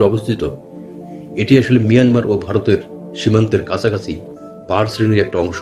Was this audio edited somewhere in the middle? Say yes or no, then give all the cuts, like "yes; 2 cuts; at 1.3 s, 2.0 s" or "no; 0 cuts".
no; 0 cuts